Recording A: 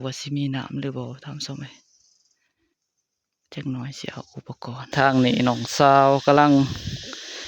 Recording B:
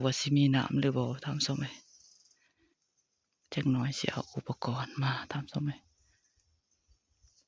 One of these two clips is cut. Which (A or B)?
A